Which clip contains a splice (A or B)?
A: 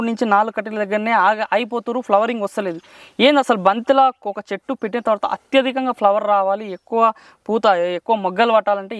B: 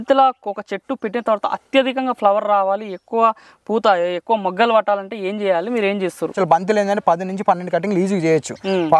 B